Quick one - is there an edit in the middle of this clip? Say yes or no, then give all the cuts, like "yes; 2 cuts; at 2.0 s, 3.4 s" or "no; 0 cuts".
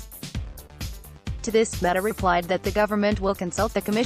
yes; 1 cut; at 1.4 s